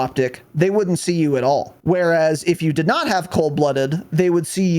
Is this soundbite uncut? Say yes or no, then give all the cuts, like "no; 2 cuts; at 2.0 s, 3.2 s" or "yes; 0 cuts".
no; 1 cut; at 1.7 s